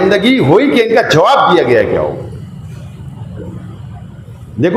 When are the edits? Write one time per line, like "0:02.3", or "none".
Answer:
none